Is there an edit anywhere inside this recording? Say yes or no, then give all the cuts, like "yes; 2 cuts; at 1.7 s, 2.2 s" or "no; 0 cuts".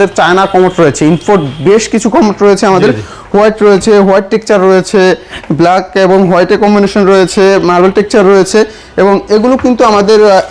no; 0 cuts